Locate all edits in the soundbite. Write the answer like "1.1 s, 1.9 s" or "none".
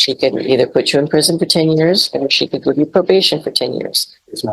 none